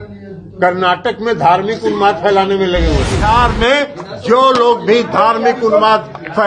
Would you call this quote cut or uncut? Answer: cut